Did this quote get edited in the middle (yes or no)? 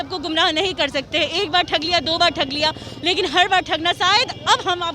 no